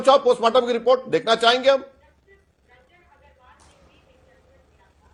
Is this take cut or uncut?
uncut